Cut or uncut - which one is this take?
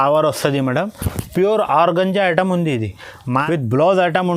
cut